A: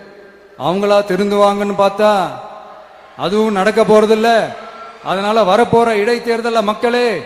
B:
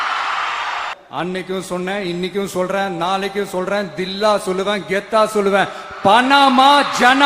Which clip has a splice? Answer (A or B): B